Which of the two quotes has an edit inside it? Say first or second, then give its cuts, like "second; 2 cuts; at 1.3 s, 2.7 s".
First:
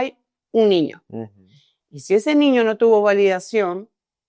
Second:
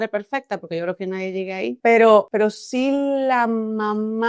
second; 2 cuts; at 1.8 s, 2.3 s